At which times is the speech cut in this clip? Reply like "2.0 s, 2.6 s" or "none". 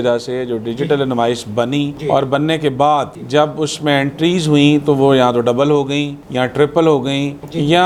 none